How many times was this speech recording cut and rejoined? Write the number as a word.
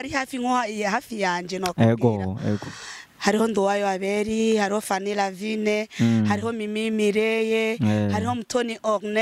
zero